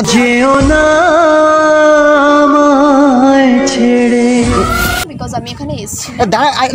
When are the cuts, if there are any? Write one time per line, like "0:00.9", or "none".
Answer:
none